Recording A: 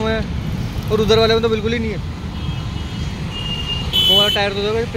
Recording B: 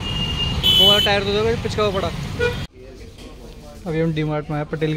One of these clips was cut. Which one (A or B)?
B